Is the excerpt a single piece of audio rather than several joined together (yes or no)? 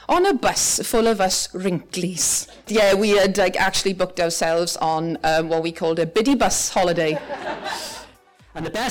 no